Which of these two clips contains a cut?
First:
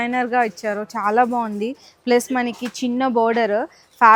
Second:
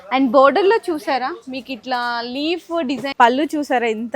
second; 1 cut; at 3.1 s

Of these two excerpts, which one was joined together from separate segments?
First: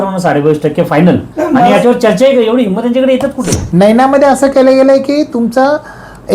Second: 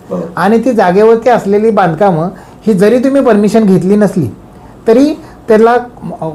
first; 1 cut; at 3.6 s

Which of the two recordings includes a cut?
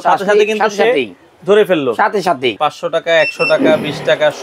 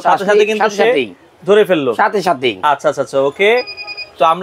first; 1 cut; at 2.6 s

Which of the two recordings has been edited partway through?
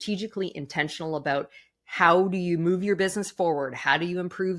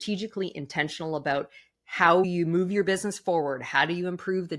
second; 1 cut; at 2.2 s

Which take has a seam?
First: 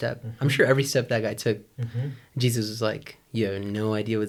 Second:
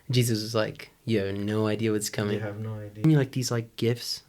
second; 1 cut; at 3.0 s

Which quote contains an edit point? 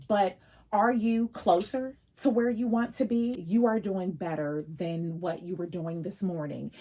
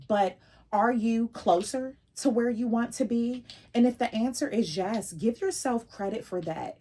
first; 1 cut; at 3.4 s

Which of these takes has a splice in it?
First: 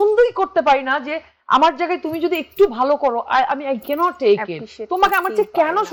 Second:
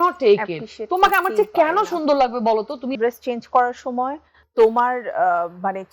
second; 1 cut; at 2.9 s

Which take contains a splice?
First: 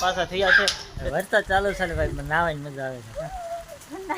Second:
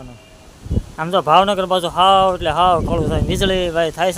first; 1 cut; at 1.1 s

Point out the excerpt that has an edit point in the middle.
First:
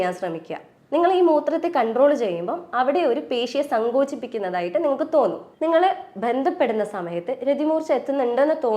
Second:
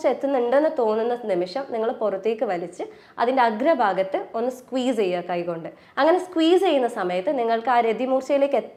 first; 1 cut; at 5.5 s

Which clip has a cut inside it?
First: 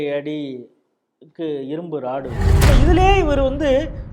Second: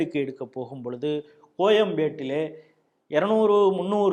first; 1 cut; at 2.5 s

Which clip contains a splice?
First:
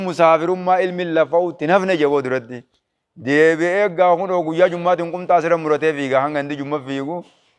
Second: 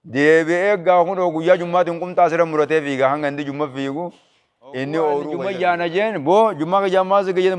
second; 1 cut; at 5.4 s

